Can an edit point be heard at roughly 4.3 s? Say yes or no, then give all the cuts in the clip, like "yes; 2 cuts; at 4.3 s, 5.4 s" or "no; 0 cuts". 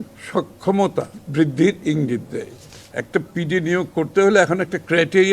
no; 1 cut; at 1.2 s